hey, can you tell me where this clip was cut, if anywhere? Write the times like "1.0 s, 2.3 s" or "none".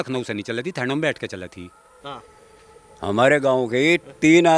1.9 s